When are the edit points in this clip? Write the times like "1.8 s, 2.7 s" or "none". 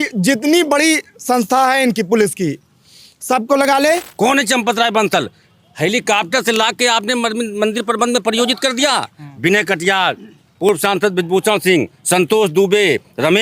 4.1 s